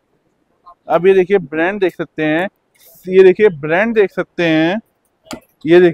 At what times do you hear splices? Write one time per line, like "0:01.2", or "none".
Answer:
none